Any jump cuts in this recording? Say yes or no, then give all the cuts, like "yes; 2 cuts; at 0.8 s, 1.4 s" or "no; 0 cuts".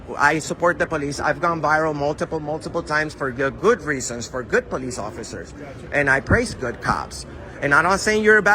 no; 0 cuts